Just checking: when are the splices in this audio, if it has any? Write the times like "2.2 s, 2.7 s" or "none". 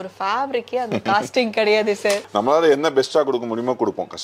none